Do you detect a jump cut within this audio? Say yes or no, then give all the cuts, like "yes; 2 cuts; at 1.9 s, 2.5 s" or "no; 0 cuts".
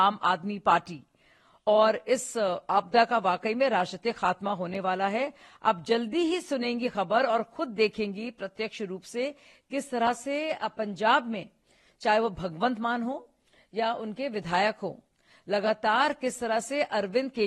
no; 0 cuts